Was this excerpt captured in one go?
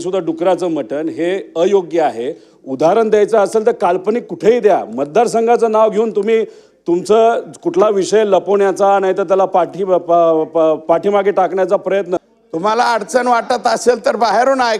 no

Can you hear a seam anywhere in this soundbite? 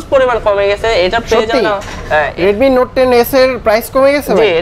yes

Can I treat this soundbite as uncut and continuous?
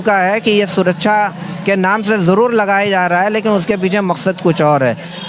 yes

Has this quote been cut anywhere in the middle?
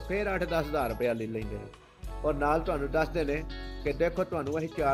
no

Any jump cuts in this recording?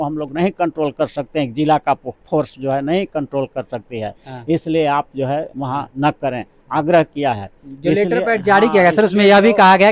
no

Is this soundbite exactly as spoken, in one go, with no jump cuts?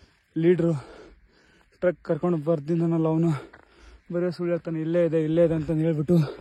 yes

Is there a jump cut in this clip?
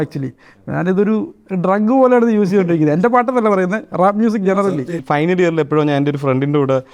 yes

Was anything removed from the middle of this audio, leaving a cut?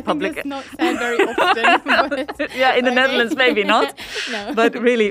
no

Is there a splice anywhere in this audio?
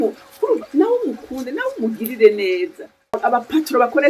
yes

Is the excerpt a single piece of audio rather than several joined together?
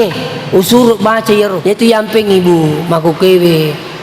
no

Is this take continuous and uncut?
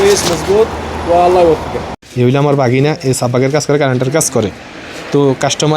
no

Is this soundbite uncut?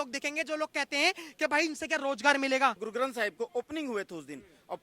no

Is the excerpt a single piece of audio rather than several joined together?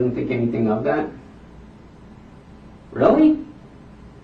yes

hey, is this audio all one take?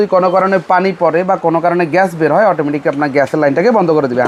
yes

